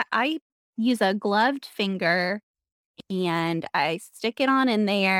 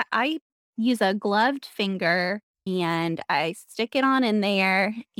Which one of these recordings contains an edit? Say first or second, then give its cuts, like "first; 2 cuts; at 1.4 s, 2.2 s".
second; 1 cut; at 2.5 s